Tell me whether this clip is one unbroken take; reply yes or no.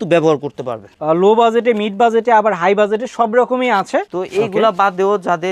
no